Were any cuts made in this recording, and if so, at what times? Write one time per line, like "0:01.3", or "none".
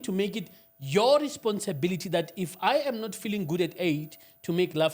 none

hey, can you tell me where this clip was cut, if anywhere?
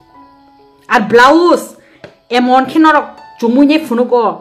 none

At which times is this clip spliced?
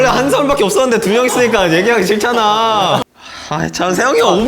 0:03.0

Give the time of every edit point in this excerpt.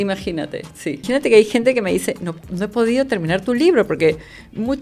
0:01.0

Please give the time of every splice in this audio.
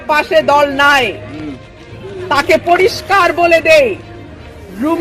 none

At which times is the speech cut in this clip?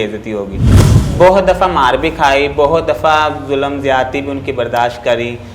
none

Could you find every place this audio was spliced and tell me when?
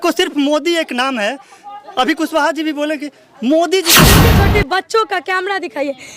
0:04.2

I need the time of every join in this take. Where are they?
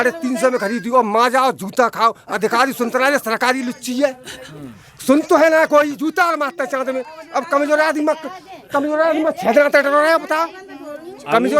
none

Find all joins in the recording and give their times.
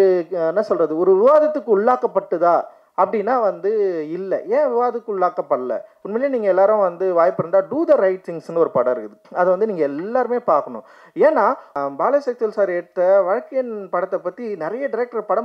0:05.9
0:11.7

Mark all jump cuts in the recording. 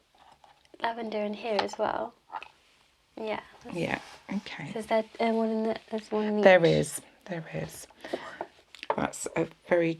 0:08.6

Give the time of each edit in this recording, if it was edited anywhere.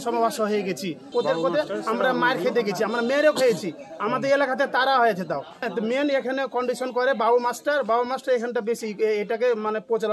0:01.0
0:05.6

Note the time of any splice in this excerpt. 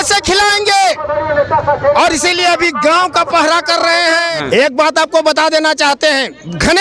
0:04.4

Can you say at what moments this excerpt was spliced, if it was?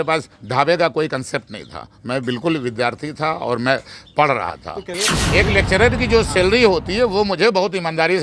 0:04.9

